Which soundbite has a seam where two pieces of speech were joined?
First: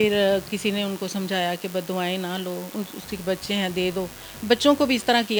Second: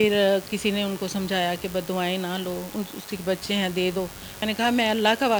second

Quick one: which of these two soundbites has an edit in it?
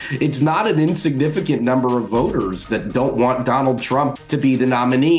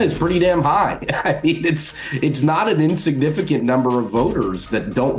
first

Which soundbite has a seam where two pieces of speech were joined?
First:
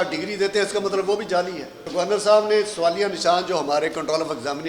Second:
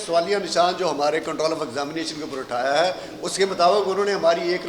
first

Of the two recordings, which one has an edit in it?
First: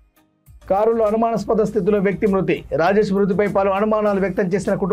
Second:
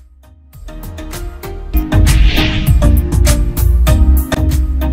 second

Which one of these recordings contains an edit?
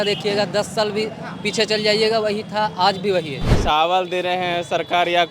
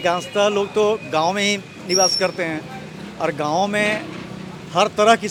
first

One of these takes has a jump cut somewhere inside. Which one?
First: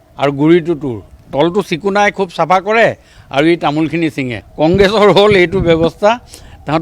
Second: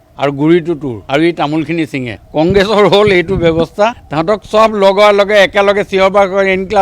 second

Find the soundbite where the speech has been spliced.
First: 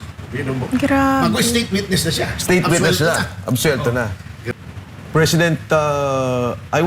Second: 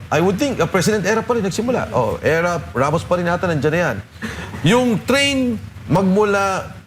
first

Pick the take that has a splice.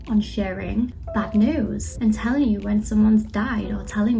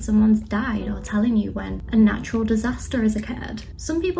first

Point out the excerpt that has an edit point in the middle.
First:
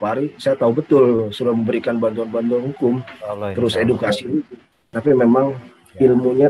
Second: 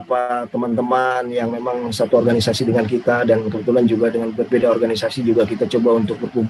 first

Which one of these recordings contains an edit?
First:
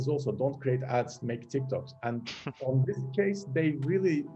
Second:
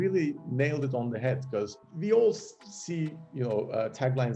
second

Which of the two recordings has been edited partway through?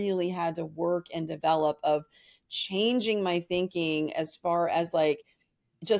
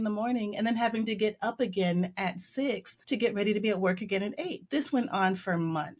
second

